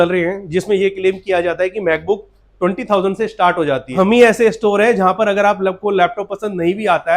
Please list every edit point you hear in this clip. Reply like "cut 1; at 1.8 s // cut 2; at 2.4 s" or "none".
cut 1; at 3.9 s